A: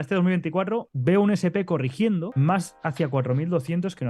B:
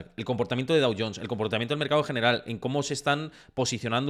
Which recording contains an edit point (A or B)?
A